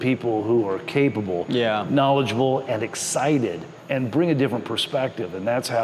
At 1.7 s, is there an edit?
no; 1 cut; at 3.7 s

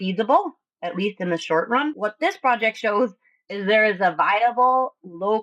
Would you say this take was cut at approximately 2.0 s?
yes; 1 cut; at 2.0 s

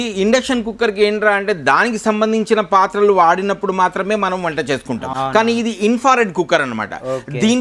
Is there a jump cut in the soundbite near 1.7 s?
no; 1 cut; at 5.1 s

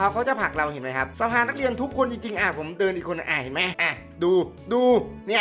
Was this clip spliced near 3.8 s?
yes; 2 cuts; at 1.1 s, 3.8 s

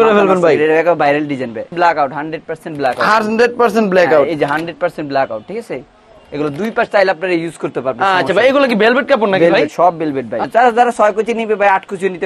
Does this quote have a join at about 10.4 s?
yes; 2 cuts; at 1.7 s, 10.4 s

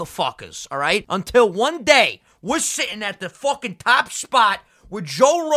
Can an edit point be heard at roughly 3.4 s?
no; 1 cut; at 1.1 s

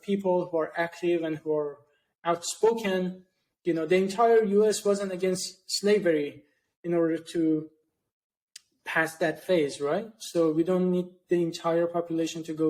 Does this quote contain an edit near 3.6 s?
no; 0 cuts

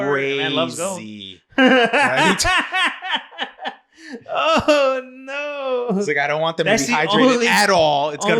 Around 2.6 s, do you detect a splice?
no; 0 cuts

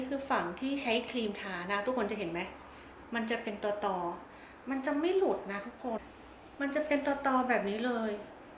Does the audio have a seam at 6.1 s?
yes; 1 cut; at 6.1 s

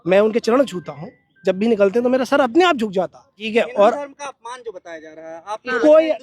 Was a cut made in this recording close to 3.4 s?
yes; 1 cut; at 3.4 s

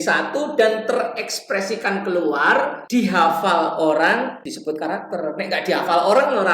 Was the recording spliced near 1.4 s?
no; 2 cuts; at 2.8 s, 4.5 s

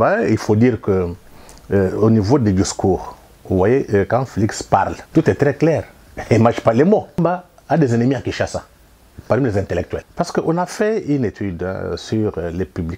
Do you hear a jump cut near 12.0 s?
no; 3 cuts; at 5.0 s, 7.2 s, 10.1 s

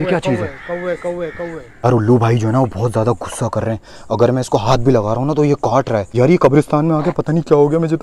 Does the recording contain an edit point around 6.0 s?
yes; 2 cuts; at 1.8 s, 6.0 s

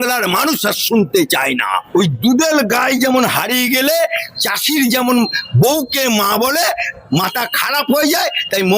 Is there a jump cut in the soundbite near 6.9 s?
no; 1 cut; at 1.8 s

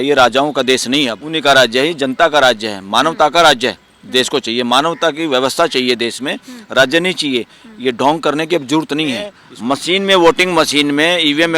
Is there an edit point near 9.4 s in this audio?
yes; 2 cuts; at 1.2 s, 9.4 s

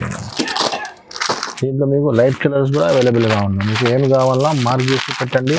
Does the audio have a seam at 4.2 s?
no; 0 cuts

